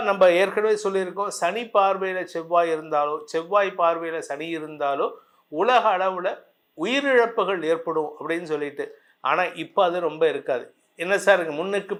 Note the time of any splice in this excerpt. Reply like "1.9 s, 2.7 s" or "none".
none